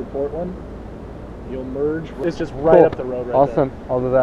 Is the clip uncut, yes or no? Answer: yes